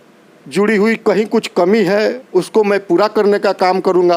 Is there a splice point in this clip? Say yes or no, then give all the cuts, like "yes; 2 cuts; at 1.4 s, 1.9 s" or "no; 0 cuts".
no; 0 cuts